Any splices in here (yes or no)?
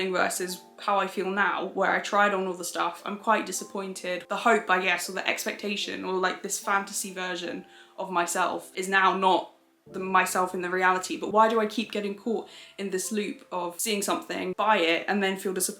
yes